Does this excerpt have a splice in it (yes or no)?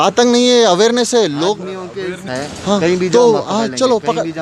no